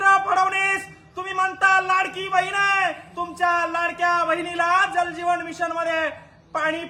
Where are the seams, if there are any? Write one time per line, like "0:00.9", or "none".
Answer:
none